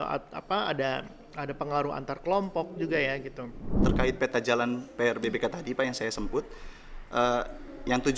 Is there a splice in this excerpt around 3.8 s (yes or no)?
yes